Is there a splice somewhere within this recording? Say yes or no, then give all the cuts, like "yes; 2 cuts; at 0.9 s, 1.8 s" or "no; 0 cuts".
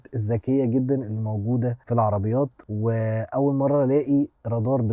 no; 0 cuts